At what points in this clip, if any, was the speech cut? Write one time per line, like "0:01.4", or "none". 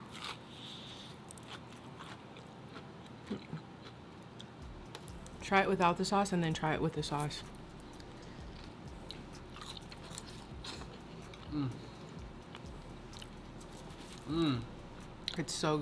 0:04.1
0:11.4